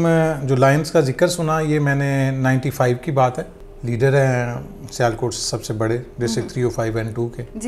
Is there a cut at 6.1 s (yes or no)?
no